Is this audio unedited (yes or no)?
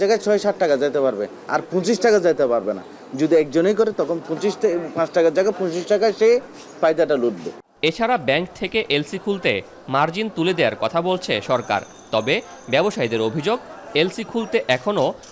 yes